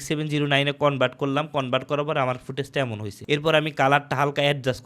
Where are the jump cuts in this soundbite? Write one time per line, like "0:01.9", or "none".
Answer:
0:03.1